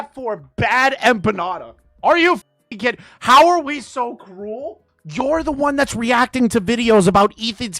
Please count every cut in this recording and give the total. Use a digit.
1